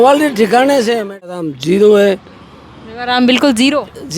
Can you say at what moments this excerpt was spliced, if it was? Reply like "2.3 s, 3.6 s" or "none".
1.3 s